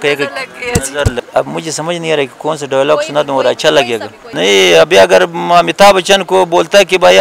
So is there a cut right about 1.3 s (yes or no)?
yes